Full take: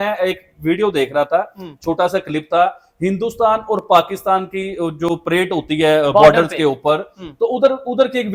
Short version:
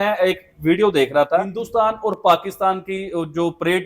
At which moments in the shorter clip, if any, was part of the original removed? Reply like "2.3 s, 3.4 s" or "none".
1.6 s